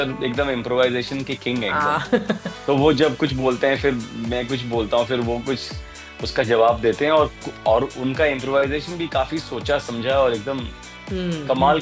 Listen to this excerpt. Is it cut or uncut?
uncut